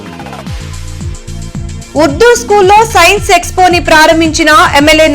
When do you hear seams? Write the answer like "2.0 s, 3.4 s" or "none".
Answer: 1.9 s